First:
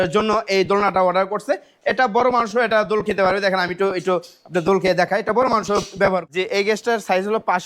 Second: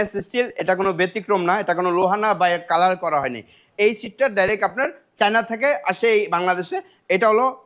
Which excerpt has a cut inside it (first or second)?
first